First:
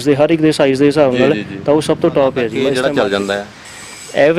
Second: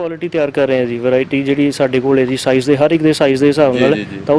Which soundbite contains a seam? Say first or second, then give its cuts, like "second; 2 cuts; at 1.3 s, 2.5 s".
first; 1 cut; at 2.7 s